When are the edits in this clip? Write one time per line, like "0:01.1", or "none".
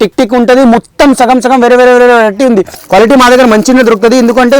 0:02.7